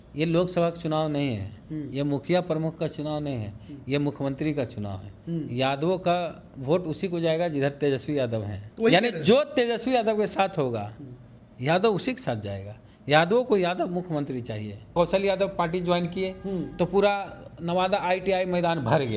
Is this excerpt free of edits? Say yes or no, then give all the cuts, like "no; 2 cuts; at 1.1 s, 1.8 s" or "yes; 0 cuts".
no; 2 cuts; at 8.6 s, 14.9 s